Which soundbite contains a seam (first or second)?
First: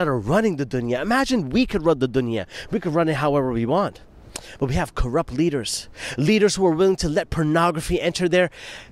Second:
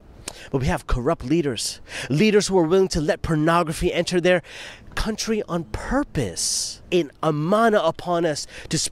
second